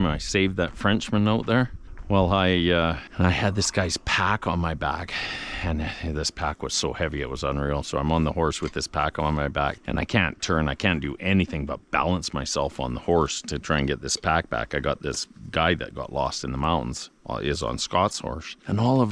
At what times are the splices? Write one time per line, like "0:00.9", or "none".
none